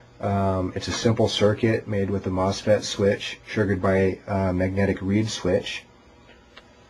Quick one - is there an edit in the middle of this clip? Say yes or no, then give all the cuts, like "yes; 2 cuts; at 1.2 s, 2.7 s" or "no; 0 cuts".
yes; 1 cut; at 1.7 s